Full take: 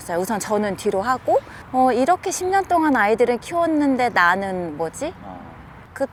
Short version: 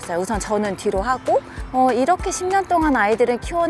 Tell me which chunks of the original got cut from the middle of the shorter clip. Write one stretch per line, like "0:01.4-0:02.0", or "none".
none